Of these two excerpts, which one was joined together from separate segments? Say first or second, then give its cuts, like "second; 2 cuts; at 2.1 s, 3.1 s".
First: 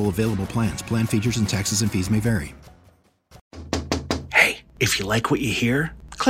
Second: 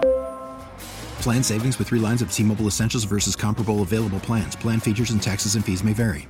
first; 1 cut; at 3.5 s